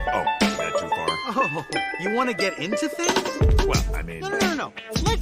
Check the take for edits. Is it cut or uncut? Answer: cut